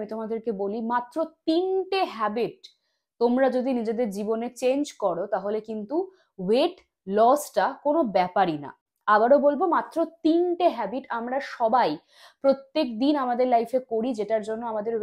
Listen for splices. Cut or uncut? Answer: uncut